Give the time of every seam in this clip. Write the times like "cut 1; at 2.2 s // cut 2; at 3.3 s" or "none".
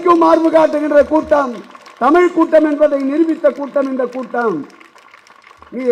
none